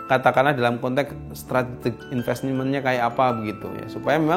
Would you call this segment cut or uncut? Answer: uncut